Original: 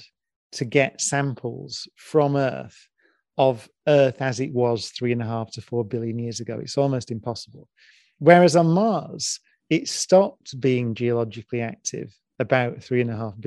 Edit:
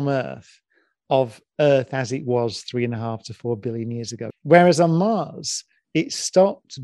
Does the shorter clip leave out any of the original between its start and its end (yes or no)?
yes